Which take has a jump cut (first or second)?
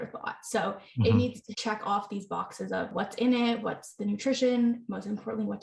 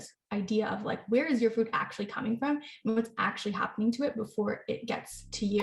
first